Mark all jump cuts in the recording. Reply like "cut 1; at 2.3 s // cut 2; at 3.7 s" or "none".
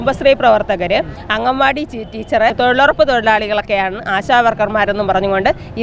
cut 1; at 2.5 s